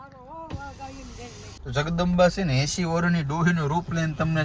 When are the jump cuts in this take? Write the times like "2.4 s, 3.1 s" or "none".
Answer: 1.5 s